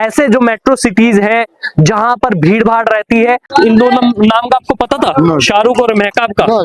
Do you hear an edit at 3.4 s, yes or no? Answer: yes